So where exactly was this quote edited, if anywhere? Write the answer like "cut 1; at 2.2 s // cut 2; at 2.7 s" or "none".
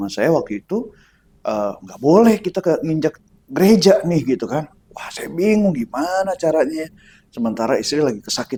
none